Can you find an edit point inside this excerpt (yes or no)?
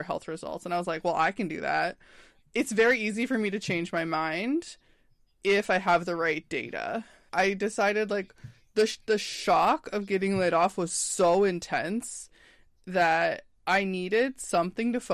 yes